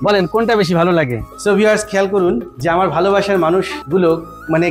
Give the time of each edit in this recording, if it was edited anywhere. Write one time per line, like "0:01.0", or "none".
0:01.3